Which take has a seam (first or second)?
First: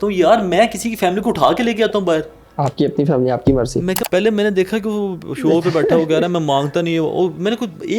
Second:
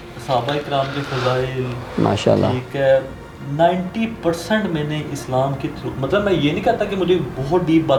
first